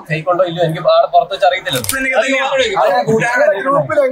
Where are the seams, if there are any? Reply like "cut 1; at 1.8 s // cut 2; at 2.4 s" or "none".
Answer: cut 1; at 2.0 s